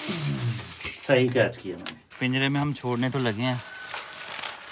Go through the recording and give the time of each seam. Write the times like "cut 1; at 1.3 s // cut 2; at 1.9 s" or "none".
cut 1; at 2.1 s